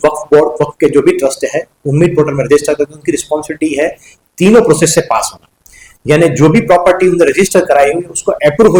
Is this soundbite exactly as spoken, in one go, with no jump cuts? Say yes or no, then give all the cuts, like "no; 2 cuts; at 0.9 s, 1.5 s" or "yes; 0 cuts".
yes; 0 cuts